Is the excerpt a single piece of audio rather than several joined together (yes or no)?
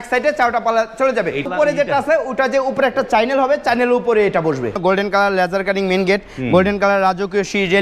no